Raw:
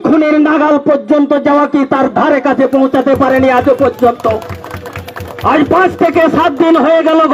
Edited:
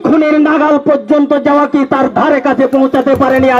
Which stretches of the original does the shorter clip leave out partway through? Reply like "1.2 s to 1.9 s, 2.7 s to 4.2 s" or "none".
none